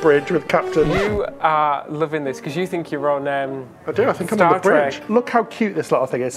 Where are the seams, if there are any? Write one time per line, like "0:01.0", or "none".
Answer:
0:05.0